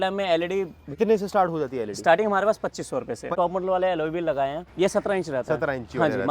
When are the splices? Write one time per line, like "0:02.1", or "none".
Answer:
0:01.0
0:03.3
0:04.6